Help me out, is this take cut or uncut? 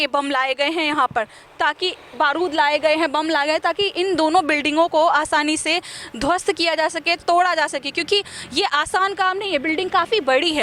uncut